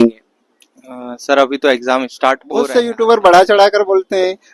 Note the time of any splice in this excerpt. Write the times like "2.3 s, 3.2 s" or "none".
2.5 s